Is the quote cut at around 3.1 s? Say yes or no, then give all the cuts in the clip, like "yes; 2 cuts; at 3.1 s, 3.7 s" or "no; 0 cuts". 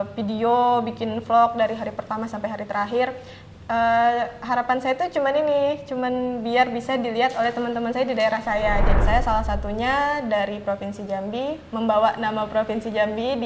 no; 1 cut; at 9.0 s